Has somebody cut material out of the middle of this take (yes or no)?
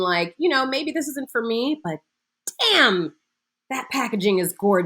no